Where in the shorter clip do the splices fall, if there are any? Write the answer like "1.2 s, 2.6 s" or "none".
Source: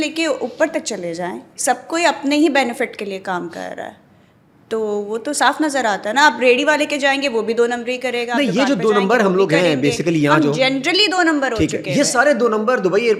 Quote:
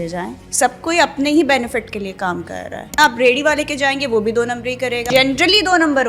3.0 s, 5.1 s